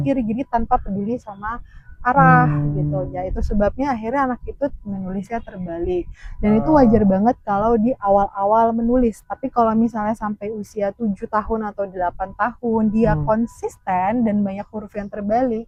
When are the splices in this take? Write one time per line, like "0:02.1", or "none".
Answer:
none